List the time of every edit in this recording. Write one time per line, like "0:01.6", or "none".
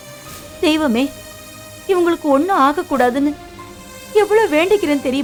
none